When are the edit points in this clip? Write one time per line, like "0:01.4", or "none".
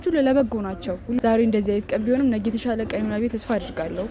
0:01.2